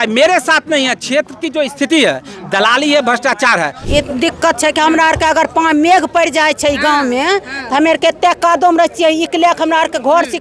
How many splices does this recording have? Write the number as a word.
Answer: one